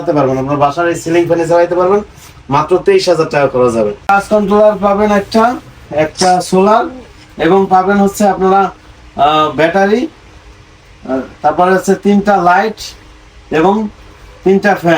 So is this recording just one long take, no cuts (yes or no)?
no